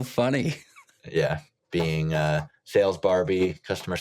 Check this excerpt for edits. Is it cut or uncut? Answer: cut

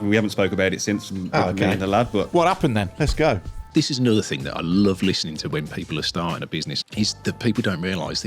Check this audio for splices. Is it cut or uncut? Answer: cut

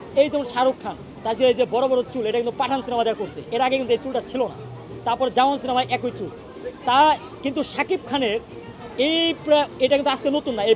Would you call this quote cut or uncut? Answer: uncut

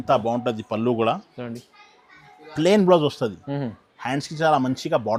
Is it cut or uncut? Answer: uncut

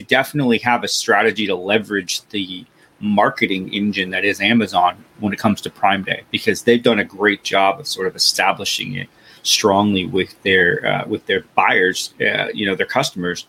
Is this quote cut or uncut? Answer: uncut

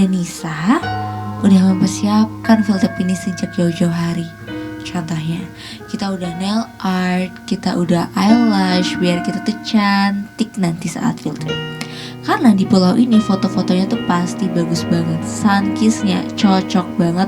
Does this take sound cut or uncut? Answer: uncut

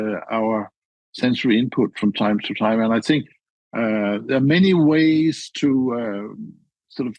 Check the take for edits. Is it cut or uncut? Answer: cut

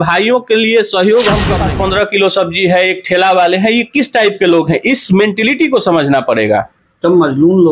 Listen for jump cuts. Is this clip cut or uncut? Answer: cut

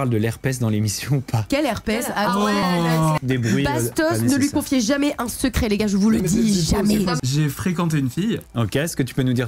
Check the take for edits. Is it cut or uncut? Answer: cut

